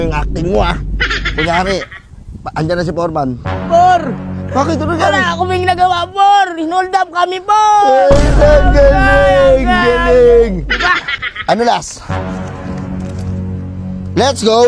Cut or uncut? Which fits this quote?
uncut